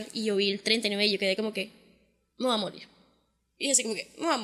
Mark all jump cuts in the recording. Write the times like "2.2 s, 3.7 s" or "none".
none